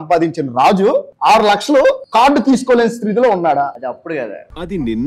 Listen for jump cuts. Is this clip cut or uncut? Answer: cut